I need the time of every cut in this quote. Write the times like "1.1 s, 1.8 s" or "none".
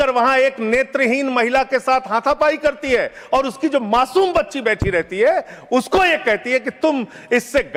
none